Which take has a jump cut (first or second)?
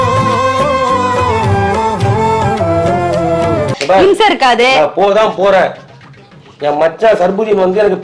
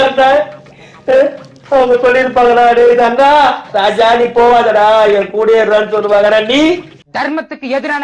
first